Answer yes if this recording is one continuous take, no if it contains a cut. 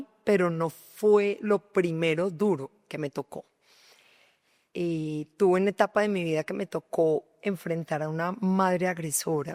yes